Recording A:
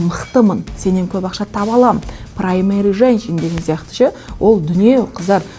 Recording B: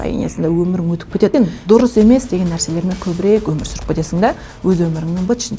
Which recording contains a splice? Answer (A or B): B